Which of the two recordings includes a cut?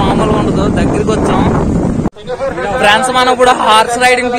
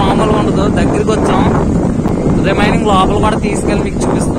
first; 1 cut; at 2.1 s

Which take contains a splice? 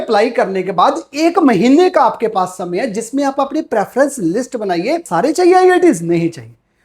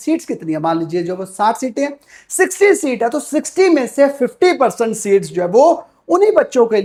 first; 1 cut; at 5.1 s

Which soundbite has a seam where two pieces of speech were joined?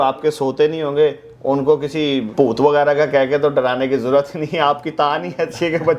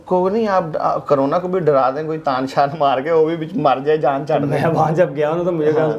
first; 1 cut; at 2.3 s

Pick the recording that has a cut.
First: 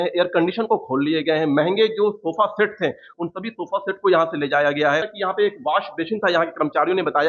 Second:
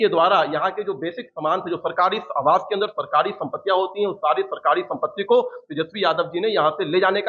first; 1 cut; at 5.1 s

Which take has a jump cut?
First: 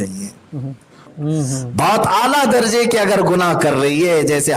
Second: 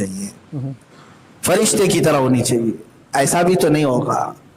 first; 1 cut; at 1.1 s

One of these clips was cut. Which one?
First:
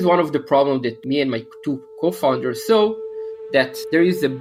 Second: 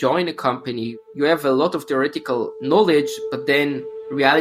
second; 1 cut; at 1.0 s

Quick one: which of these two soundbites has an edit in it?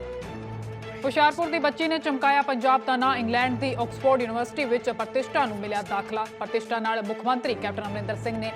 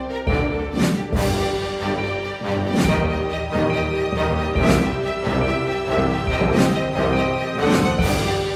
first; 1 cut; at 1.0 s

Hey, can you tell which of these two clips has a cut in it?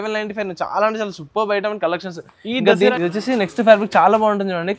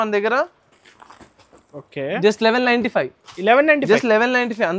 first; 1 cut; at 2.9 s

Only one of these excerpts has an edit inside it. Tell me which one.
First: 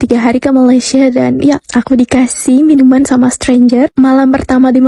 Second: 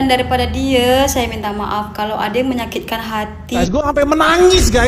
second; 1 cut; at 3.6 s

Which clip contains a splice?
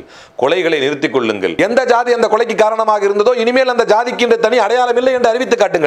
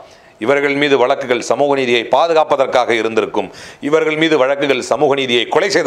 first; 1 cut; at 1.5 s

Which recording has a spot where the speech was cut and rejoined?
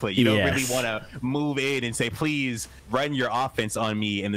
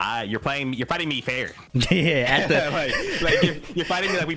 second; 1 cut; at 1.5 s

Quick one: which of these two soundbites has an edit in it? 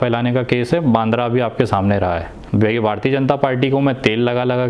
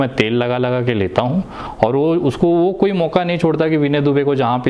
first; 1 cut; at 2.3 s

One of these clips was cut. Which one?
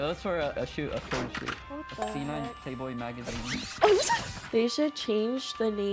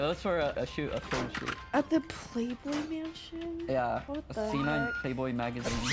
first; 2 cuts; at 1.6 s, 4.5 s

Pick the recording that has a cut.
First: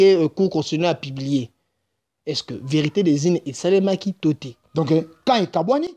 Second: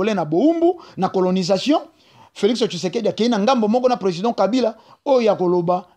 first; 1 cut; at 4.6 s

